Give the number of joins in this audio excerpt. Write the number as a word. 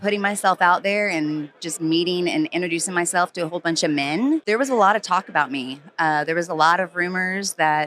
one